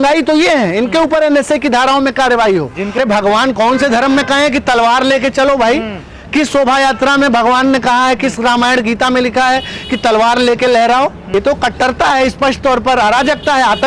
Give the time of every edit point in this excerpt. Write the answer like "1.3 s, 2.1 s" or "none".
2.9 s, 11.2 s